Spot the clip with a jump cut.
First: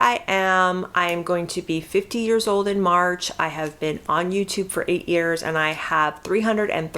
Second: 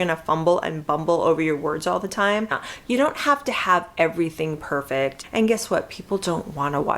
second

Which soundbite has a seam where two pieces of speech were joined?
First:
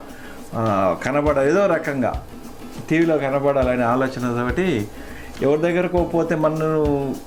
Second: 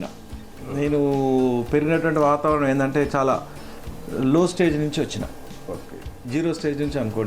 second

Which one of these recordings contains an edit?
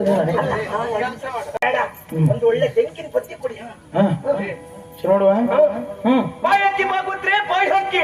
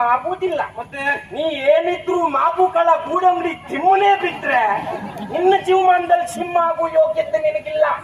first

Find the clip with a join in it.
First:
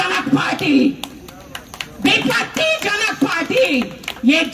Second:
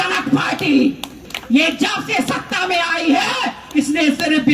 second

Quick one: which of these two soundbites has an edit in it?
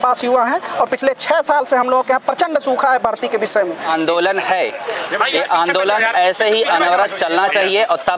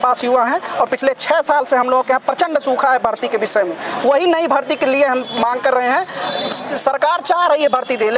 first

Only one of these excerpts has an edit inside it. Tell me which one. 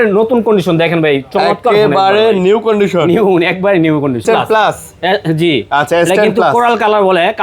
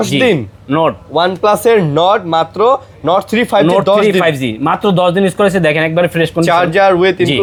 first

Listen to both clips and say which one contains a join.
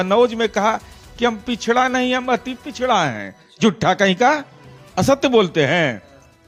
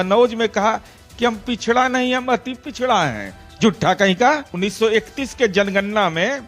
second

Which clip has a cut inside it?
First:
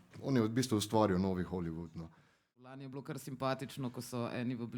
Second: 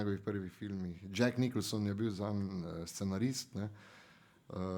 first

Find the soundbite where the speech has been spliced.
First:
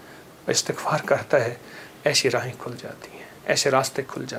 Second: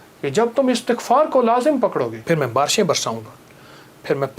second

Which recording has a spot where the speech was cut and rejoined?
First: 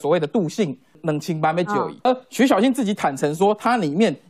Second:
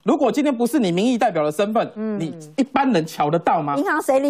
first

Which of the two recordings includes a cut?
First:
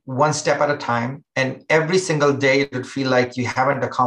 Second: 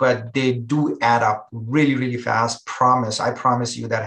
first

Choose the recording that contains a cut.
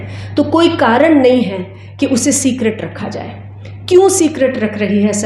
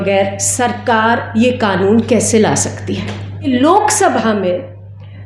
second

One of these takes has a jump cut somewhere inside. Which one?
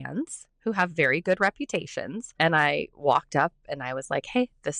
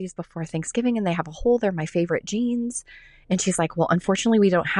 first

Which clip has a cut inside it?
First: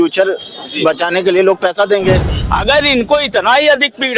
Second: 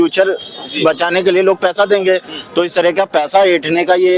first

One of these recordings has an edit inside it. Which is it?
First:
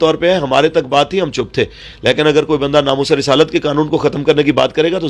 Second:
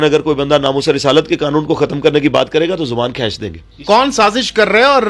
second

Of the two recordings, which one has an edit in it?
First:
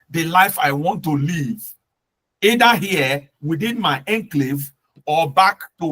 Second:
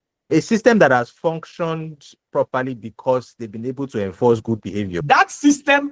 second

